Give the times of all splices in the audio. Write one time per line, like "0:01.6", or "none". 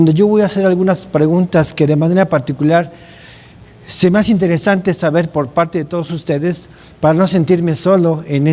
none